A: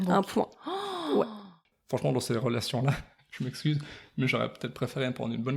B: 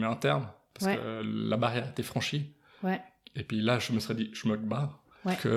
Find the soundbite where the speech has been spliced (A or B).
A